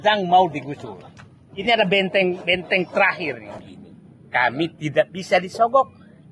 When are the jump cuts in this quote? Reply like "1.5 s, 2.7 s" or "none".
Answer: 1.5 s, 3.6 s